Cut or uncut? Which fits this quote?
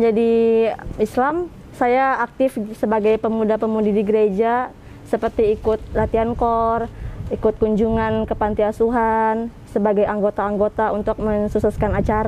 uncut